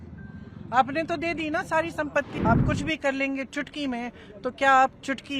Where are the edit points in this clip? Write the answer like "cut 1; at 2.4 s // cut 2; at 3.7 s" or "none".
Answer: cut 1; at 2.3 s